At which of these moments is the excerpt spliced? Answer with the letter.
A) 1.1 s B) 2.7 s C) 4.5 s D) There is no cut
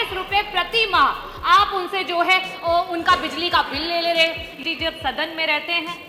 C